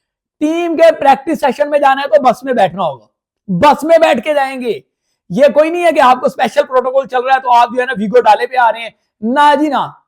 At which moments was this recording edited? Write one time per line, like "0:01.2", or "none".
none